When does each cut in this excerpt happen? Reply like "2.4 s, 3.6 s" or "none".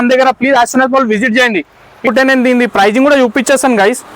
2.1 s